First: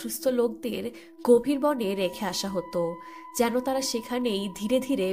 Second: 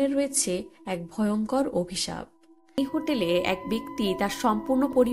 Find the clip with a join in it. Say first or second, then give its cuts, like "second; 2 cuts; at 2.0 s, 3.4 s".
second; 1 cut; at 2.8 s